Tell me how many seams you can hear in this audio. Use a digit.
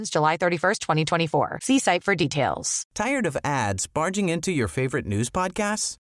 1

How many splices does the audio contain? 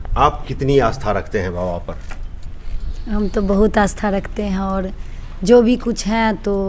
0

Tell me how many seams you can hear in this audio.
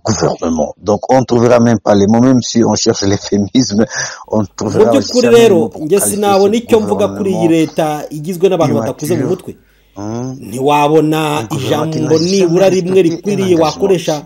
1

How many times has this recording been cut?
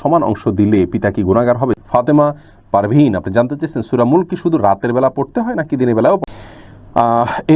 2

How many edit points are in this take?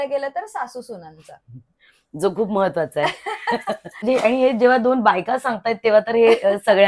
1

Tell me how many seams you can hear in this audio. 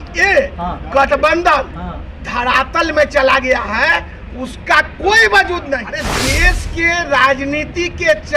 1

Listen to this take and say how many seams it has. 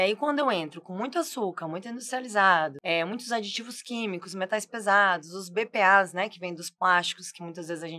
1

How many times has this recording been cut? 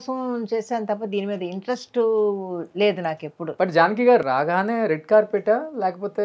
1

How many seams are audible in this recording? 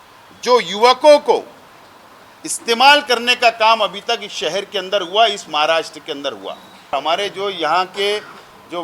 1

